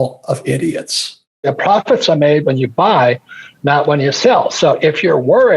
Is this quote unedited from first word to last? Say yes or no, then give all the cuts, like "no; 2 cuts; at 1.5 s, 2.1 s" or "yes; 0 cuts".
no; 1 cut; at 1.5 s